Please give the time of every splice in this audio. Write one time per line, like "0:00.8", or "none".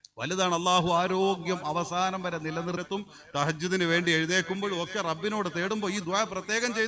0:02.8